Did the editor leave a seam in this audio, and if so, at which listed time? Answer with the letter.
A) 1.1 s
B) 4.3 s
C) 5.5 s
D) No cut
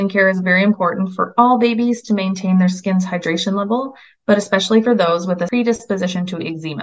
C